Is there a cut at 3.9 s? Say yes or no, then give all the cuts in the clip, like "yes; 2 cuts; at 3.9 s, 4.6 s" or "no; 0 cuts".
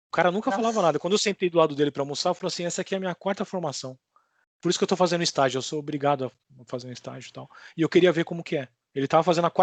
no; 0 cuts